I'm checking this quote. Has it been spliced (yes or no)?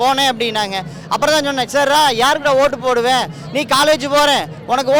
no